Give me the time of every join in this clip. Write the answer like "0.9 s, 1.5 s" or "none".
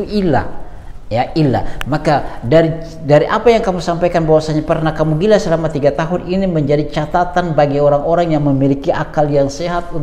none